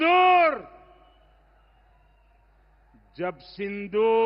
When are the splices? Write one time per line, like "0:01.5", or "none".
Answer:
none